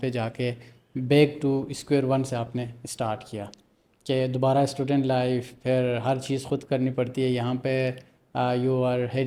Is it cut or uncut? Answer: uncut